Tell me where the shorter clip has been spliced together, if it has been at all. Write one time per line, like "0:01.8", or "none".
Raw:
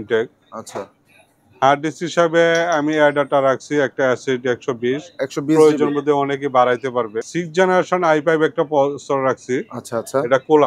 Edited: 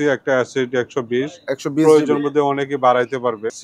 none